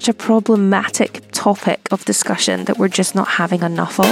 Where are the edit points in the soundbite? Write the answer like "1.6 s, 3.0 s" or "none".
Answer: none